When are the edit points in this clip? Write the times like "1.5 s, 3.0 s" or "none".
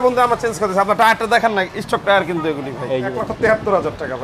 3.2 s